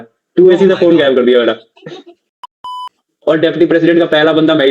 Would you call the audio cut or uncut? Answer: cut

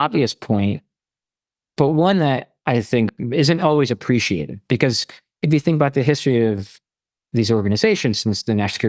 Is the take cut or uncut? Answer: uncut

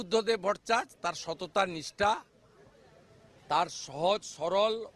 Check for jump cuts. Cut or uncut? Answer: uncut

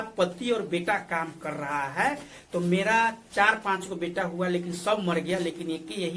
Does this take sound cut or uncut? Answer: uncut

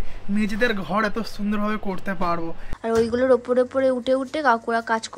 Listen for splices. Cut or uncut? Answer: cut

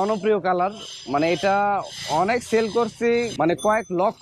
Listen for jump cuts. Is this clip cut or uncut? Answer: cut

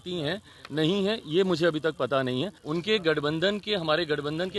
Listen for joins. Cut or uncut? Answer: cut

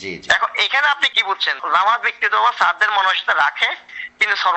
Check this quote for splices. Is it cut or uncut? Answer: cut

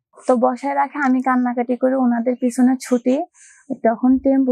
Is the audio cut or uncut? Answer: uncut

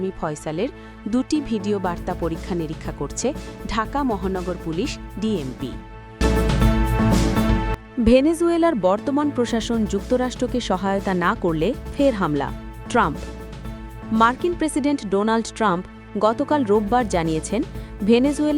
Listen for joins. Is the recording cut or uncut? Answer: cut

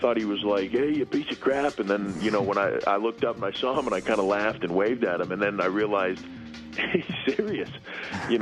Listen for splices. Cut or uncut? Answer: uncut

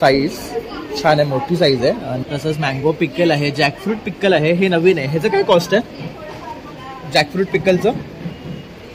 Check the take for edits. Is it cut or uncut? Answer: cut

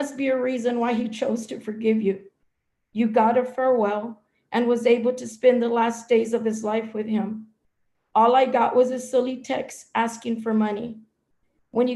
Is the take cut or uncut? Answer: uncut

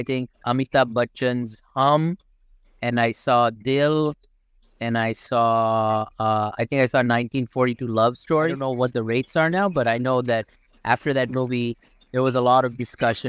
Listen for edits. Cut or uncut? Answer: cut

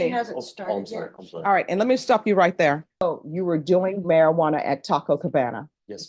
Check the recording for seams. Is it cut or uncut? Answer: cut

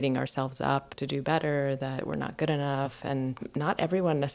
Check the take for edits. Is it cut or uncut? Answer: cut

